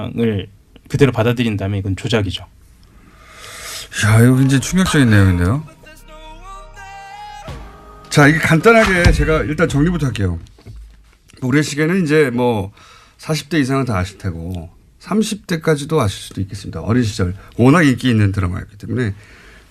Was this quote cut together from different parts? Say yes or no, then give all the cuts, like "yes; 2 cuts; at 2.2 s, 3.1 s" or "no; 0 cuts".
yes; 1 cut; at 5.8 s